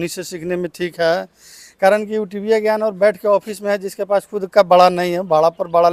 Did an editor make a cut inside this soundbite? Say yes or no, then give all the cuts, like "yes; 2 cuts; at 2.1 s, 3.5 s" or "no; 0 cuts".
no; 0 cuts